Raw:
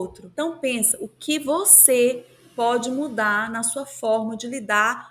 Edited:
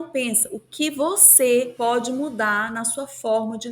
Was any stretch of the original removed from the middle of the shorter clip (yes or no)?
yes